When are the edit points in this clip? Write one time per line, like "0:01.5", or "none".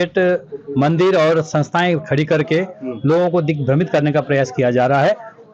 none